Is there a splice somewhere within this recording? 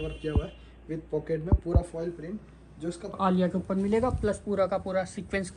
yes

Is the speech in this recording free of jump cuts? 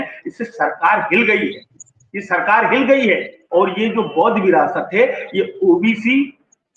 no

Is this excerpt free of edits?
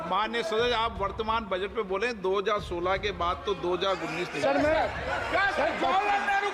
yes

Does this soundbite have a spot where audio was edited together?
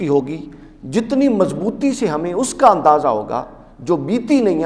no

